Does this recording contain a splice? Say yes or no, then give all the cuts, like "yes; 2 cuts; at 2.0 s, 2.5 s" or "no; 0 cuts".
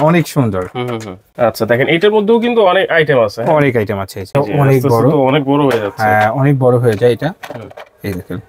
yes; 2 cuts; at 1.2 s, 4.2 s